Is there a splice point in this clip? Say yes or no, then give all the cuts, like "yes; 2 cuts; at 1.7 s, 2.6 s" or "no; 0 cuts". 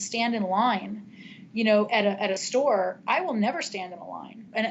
no; 0 cuts